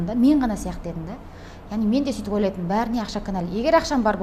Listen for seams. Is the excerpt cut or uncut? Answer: uncut